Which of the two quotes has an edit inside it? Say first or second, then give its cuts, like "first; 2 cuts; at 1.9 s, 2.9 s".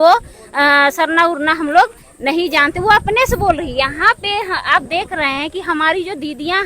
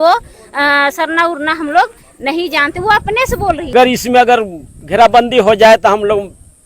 second; 1 cut; at 3.7 s